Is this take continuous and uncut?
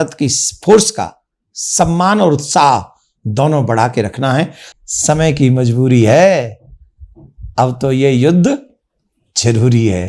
no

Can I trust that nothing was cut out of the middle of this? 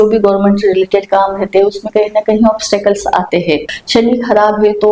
no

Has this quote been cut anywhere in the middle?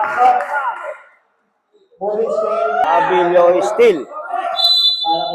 yes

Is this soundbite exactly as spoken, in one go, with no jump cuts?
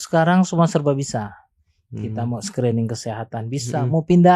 yes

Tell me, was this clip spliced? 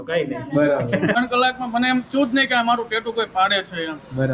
yes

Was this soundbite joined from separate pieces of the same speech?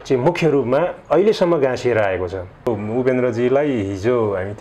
yes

